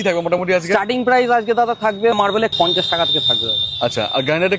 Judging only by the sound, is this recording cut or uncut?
cut